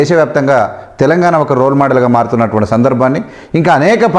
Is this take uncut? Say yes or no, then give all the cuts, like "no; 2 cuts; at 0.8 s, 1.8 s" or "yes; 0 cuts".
yes; 0 cuts